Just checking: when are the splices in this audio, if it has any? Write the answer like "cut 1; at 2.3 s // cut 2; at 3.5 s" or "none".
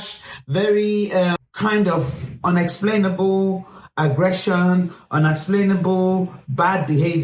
cut 1; at 1.4 s